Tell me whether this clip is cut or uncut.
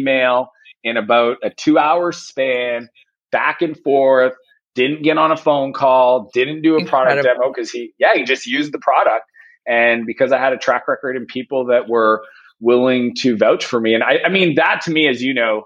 uncut